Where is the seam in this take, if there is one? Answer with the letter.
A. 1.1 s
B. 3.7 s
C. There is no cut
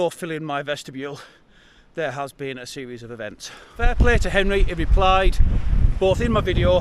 B